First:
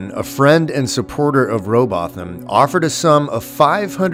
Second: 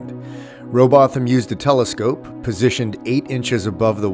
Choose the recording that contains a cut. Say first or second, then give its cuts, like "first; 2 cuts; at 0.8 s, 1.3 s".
second; 1 cut; at 3.0 s